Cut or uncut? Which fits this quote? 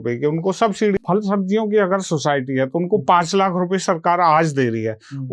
cut